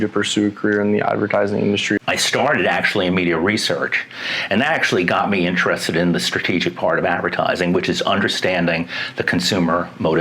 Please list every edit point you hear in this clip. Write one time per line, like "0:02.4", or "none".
0:02.0

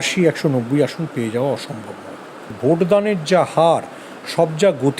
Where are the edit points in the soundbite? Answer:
0:02.5

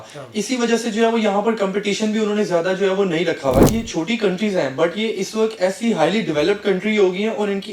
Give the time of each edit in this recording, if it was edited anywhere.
0:03.7

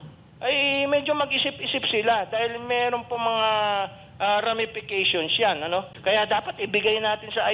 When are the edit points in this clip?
0:05.9

